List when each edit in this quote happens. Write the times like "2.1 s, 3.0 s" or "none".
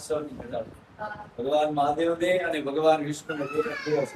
none